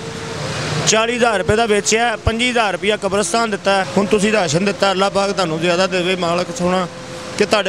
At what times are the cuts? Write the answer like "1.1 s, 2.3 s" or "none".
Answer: 3.9 s

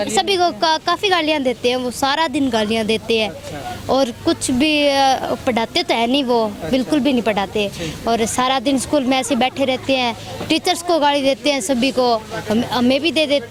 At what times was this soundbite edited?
none

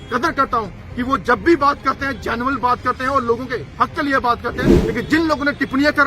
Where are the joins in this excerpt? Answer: 4.7 s

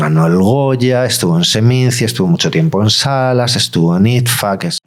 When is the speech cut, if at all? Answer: none

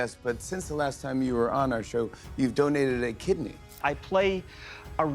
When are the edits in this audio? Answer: 3.7 s

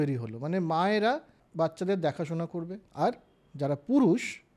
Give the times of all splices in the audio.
1.4 s, 2.8 s

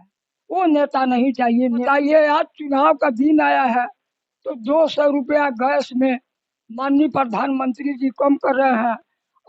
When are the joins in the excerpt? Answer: 1.8 s

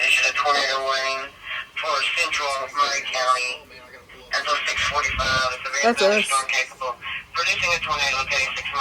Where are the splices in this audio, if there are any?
none

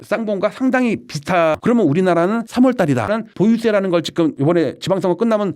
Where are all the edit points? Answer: 1.6 s, 3.1 s

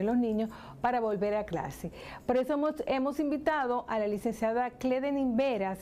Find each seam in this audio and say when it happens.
none

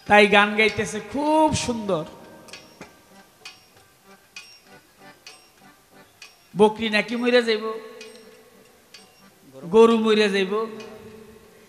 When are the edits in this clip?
none

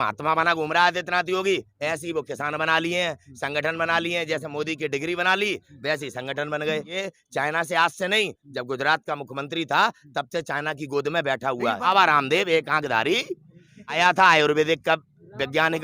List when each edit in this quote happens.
7.0 s, 11.9 s, 13.9 s

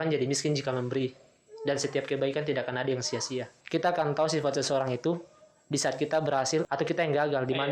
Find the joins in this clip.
3.6 s, 6.7 s

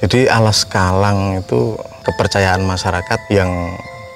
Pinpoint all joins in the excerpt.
1.9 s, 3.2 s

